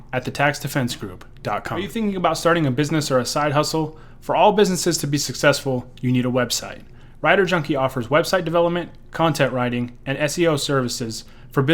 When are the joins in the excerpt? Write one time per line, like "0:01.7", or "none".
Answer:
0:01.9